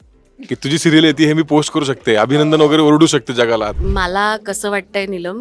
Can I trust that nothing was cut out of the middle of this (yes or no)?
no